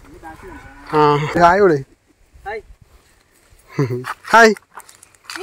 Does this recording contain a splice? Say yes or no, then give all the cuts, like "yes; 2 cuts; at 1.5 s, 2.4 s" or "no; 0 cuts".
yes; 1 cut; at 1.3 s